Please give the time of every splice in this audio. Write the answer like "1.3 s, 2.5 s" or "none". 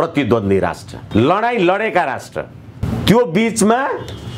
1.0 s, 2.8 s